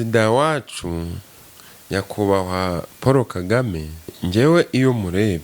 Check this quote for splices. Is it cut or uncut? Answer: cut